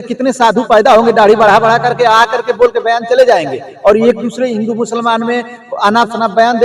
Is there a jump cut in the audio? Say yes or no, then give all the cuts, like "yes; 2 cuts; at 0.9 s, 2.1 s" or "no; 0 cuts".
no; 0 cuts